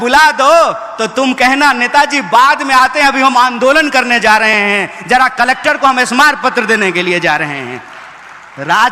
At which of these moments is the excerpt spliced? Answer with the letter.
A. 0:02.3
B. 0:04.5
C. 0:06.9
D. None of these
D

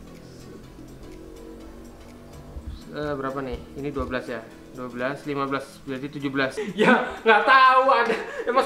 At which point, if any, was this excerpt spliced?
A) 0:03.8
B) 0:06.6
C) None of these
B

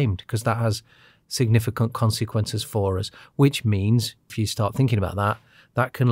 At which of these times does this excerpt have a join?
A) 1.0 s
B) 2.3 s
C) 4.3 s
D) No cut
C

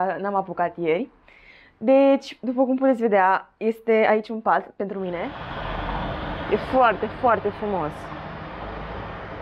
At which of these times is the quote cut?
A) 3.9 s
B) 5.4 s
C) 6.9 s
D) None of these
B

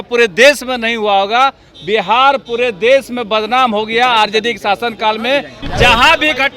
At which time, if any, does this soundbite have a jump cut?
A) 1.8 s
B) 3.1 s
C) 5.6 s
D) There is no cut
C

